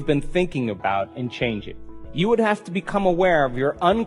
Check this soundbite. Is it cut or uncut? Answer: cut